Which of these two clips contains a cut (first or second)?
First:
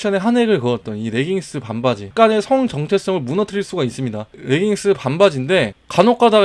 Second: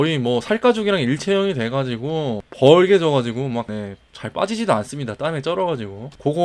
first